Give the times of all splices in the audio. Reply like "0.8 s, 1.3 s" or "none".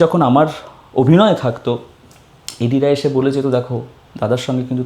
none